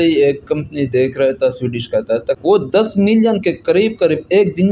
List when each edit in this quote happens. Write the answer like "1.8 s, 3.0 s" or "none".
2.3 s